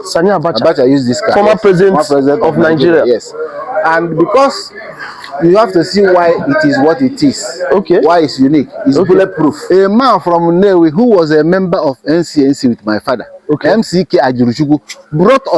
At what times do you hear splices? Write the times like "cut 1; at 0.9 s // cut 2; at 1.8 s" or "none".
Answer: cut 1; at 9.6 s